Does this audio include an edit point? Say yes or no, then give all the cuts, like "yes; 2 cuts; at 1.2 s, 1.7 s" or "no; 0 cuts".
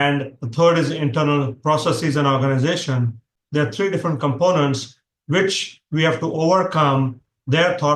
no; 0 cuts